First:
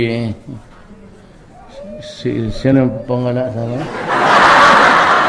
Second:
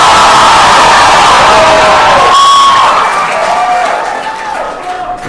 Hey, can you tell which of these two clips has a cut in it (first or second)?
second